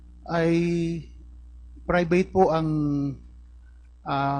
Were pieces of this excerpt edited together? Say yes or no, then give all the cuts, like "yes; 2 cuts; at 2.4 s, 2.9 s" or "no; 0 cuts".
no; 0 cuts